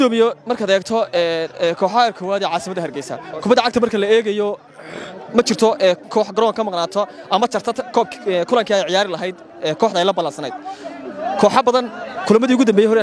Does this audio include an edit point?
no; 0 cuts

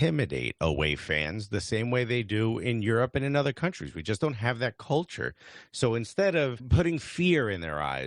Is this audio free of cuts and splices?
yes; 0 cuts

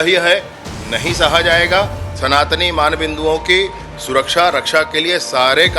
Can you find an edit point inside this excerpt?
no; 0 cuts

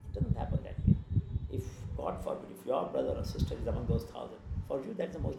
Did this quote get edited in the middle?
no; 0 cuts

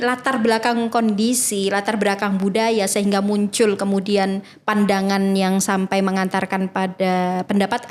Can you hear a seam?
no; 0 cuts

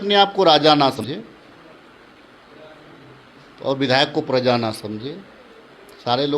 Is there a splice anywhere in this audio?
yes; 1 cut; at 1.0 s

